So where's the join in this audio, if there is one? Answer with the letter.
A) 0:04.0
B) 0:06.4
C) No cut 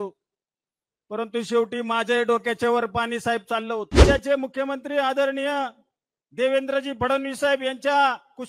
A